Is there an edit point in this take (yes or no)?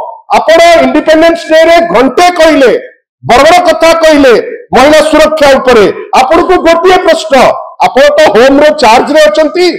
no